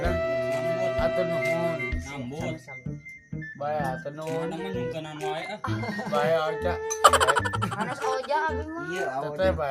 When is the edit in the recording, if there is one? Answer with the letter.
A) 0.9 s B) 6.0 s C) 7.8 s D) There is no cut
D